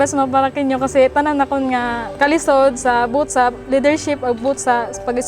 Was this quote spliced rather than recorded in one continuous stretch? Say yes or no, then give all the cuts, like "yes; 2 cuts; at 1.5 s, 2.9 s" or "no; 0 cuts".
yes; 1 cut; at 2.1 s